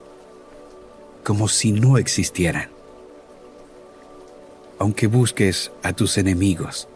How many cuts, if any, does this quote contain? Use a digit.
0